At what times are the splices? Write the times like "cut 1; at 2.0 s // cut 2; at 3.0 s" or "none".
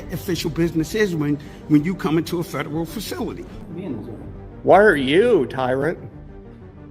cut 1; at 3.5 s